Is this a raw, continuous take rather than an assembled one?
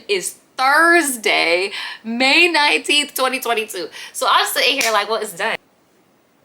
no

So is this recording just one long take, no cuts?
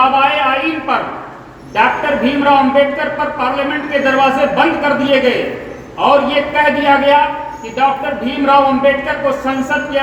yes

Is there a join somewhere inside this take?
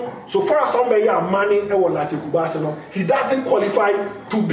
no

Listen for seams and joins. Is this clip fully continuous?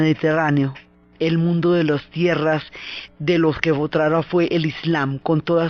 no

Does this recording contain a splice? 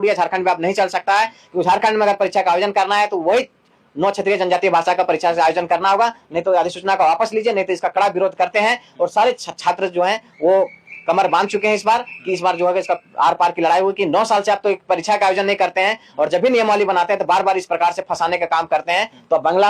no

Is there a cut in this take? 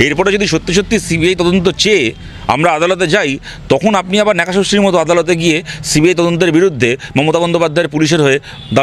no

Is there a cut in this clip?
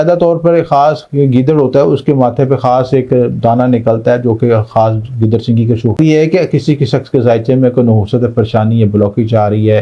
yes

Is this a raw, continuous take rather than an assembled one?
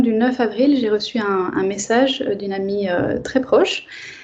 yes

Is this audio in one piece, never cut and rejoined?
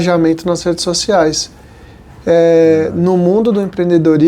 yes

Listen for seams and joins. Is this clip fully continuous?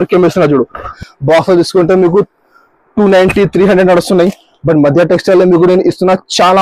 no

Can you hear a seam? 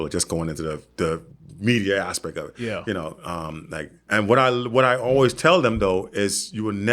yes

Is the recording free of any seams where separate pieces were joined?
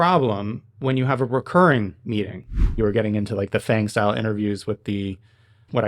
no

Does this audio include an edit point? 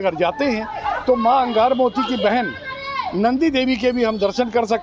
no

